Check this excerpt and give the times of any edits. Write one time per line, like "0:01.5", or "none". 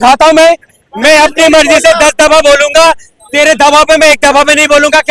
none